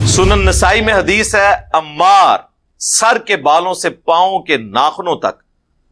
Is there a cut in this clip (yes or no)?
no